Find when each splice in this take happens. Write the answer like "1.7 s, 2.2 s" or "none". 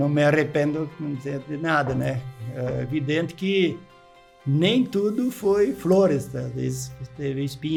none